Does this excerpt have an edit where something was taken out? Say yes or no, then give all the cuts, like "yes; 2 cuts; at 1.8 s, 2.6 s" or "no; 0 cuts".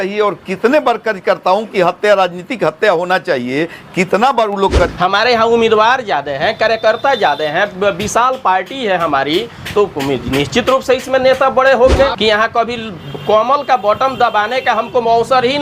yes; 2 cuts; at 4.9 s, 12.2 s